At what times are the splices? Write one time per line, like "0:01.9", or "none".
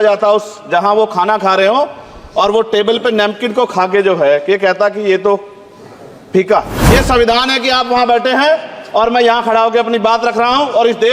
0:06.8